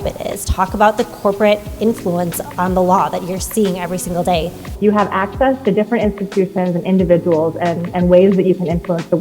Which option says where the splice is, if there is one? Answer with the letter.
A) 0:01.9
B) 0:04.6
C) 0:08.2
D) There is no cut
B